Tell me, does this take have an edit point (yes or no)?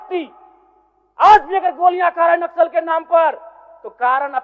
no